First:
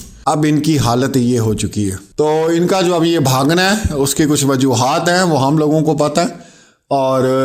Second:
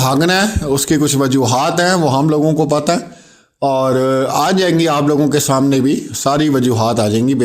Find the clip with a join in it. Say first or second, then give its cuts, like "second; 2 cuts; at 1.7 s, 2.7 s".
first; 1 cut; at 2.0 s